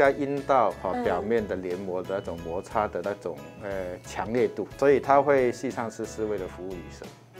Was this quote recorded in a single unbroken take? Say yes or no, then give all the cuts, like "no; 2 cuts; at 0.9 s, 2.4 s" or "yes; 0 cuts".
no; 1 cut; at 4.7 s